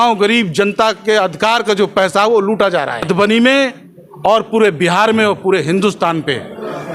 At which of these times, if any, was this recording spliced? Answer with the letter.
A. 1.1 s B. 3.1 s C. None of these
B